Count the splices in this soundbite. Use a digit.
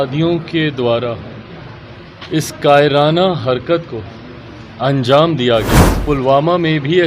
1